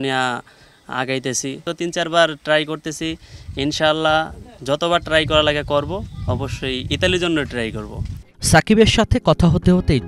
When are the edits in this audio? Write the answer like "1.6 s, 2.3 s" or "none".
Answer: none